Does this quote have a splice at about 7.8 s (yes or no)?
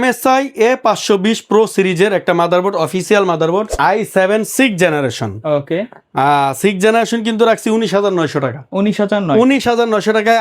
no